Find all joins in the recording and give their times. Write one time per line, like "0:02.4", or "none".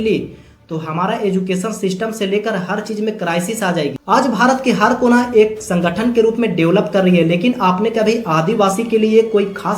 0:04.0